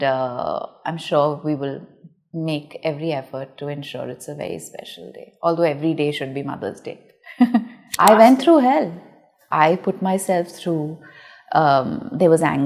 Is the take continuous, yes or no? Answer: no